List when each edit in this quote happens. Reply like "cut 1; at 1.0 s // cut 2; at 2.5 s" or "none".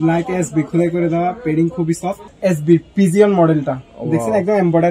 cut 1; at 2.2 s

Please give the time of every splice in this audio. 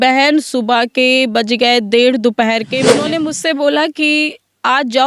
cut 1; at 3.1 s

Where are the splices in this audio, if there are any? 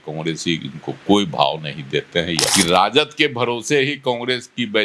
cut 1; at 2.5 s

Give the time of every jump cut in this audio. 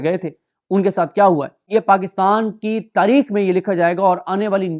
cut 1; at 1.7 s

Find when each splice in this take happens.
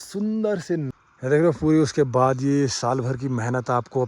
cut 1; at 1.0 s

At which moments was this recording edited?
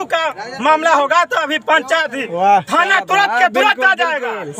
none

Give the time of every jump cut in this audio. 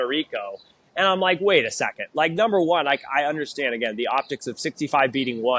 none

